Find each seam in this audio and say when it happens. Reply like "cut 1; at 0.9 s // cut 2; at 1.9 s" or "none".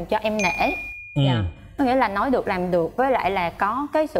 none